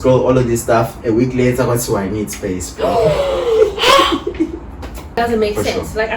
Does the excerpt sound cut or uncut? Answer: cut